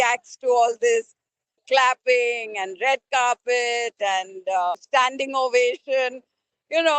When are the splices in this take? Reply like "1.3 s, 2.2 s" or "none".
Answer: 1.6 s, 4.8 s